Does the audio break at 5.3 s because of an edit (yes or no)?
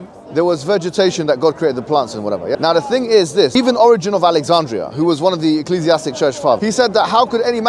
no